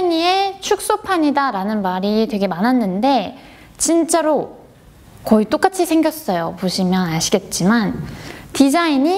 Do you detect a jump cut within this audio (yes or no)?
no